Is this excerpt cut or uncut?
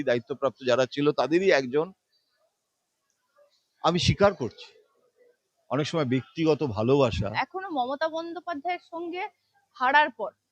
cut